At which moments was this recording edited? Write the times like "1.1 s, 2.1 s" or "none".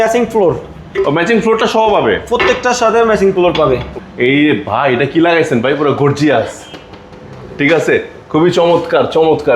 4.0 s